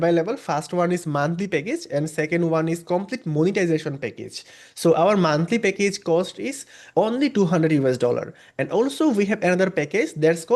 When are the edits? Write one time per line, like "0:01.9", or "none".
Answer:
0:06.7